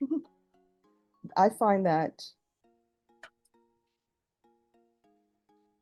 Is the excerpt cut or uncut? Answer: uncut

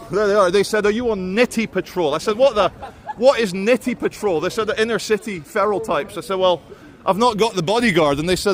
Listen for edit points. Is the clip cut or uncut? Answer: uncut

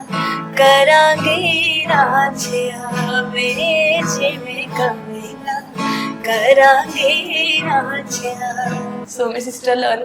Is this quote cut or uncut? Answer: cut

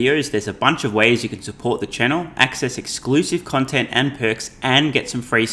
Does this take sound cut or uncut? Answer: uncut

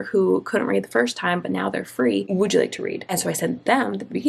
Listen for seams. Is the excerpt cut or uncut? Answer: cut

